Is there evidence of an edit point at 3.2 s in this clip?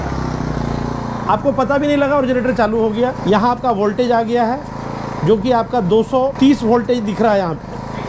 no; 0 cuts

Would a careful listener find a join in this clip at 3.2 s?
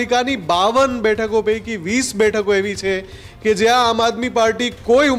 no; 0 cuts

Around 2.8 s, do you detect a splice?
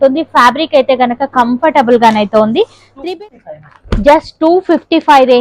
yes; 1 cut; at 2.8 s

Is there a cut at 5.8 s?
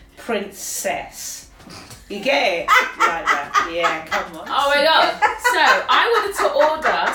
no; 1 cut; at 4.4 s

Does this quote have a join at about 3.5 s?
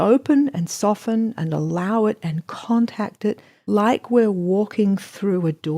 yes; 1 cut; at 3.5 s

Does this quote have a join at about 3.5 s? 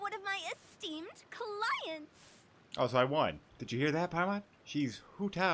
yes; 2 cuts; at 3.5 s, 4.6 s

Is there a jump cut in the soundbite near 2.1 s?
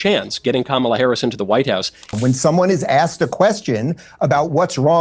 yes; 1 cut; at 2.1 s

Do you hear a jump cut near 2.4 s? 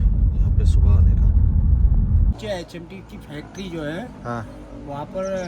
yes; 1 cut; at 2.4 s

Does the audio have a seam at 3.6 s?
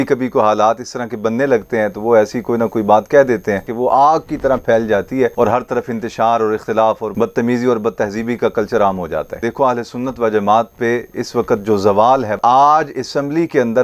yes; 3 cuts; at 3.6 s, 9.3 s, 12.4 s

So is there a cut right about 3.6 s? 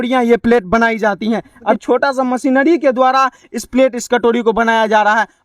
no; 1 cut; at 1.7 s

